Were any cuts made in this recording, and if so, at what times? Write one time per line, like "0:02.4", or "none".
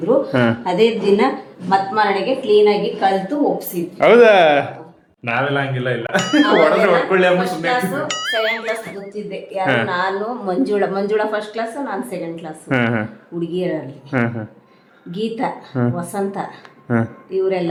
none